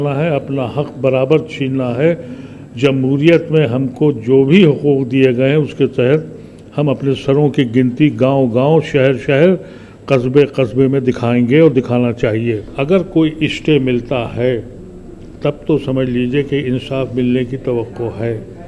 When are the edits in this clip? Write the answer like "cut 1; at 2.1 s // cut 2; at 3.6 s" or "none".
cut 1; at 12.7 s

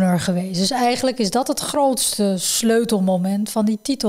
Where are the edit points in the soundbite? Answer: none

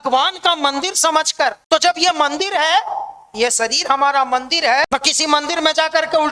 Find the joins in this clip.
none

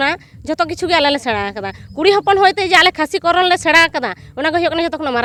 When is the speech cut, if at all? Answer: none

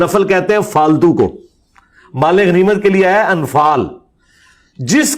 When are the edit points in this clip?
cut 1; at 1.4 s

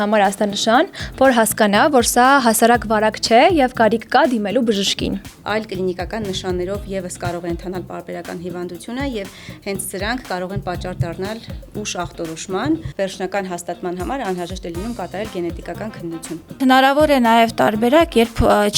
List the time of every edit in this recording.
cut 1; at 5.3 s // cut 2; at 12.9 s // cut 3; at 16.6 s

